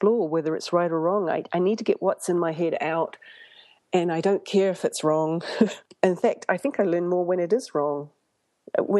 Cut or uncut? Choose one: cut